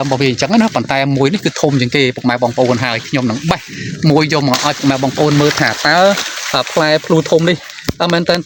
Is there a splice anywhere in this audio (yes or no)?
no